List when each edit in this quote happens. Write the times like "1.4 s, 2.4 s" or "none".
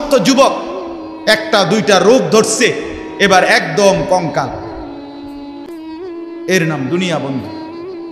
4.5 s, 5.9 s